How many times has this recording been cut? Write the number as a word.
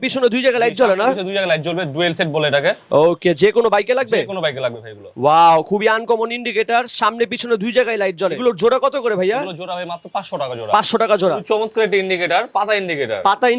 zero